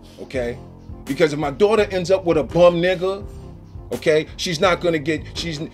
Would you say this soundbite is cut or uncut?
uncut